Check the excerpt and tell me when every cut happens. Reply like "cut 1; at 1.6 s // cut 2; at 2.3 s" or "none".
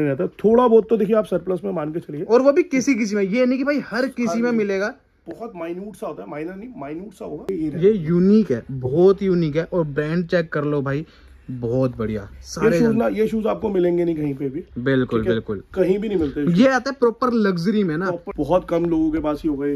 cut 1; at 7.4 s // cut 2; at 18.2 s